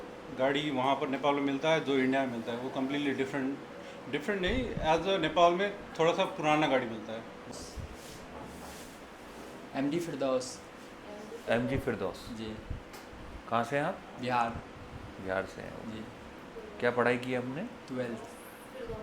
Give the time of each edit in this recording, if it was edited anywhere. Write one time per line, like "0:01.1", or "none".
0:07.4